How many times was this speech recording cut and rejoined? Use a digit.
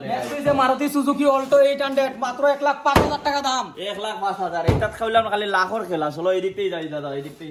0